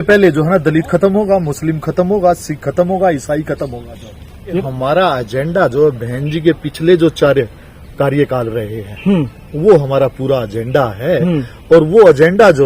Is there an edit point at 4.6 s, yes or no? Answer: yes